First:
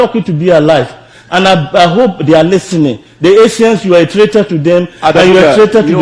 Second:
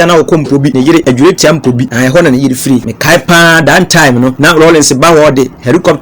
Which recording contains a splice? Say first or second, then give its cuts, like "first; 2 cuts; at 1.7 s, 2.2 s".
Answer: second; 4 cuts; at 0.8 s, 1.9 s, 2.9 s, 4.4 s